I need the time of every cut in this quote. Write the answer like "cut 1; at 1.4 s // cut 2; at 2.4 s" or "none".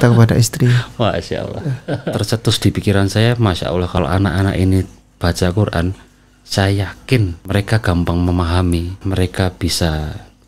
cut 1; at 2.0 s // cut 2; at 3.9 s // cut 3; at 7.4 s // cut 4; at 9.0 s